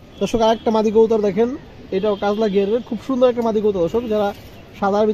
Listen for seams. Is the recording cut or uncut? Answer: uncut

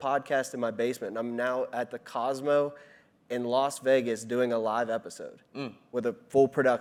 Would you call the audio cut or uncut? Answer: uncut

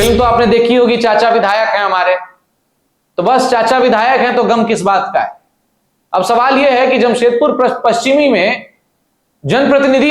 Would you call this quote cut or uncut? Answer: uncut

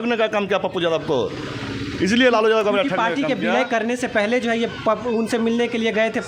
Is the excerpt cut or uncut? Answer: uncut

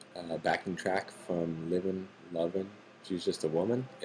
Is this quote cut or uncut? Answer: cut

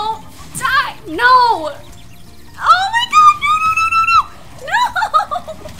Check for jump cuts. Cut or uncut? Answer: uncut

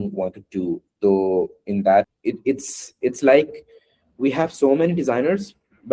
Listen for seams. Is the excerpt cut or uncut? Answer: cut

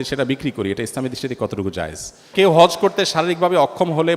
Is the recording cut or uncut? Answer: cut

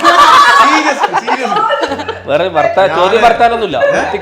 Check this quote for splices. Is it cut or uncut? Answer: uncut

